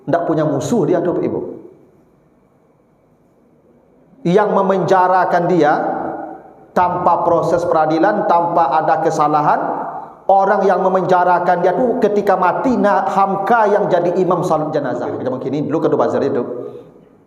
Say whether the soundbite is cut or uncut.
cut